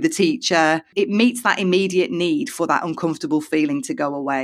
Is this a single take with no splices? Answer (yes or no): yes